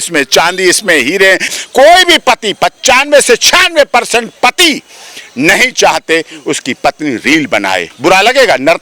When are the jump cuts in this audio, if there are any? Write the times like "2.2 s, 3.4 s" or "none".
1.5 s, 7.9 s